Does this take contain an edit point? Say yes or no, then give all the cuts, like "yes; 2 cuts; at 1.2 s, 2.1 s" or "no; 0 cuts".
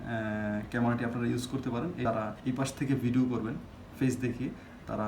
yes; 1 cut; at 2.0 s